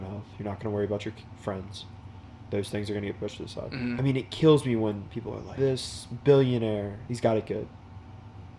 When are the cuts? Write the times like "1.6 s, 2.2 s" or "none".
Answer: 4.0 s, 5.5 s, 7.0 s